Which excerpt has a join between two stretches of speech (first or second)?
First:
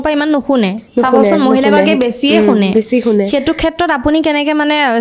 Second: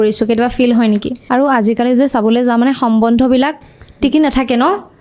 second